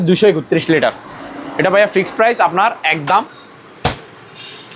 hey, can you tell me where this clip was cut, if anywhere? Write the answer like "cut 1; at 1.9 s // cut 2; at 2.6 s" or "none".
none